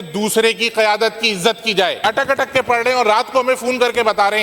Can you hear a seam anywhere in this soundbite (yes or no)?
yes